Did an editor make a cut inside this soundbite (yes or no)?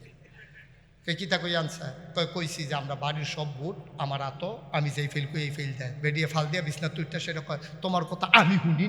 yes